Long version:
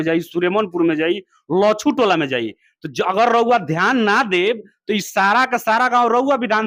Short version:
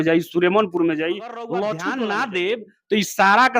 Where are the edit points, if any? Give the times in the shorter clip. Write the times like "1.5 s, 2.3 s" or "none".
1.9 s